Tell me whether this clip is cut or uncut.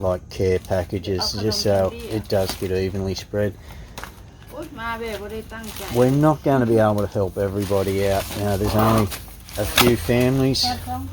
cut